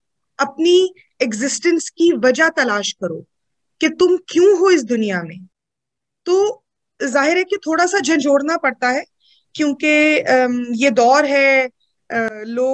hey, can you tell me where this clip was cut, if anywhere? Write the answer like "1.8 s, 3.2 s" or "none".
none